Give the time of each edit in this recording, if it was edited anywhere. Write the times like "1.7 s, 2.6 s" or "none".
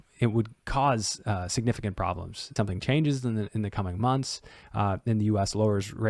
2.5 s

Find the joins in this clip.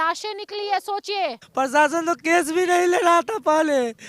1.4 s

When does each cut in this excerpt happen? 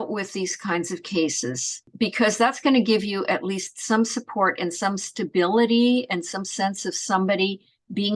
none

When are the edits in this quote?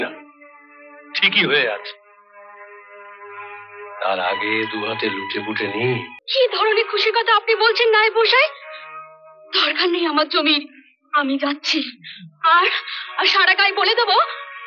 6.2 s

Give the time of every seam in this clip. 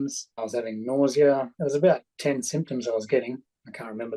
none

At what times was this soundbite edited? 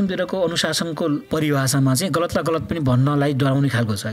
1.2 s

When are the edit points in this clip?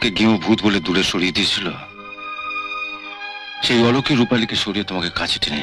none

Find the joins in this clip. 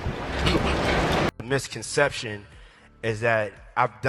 1.3 s

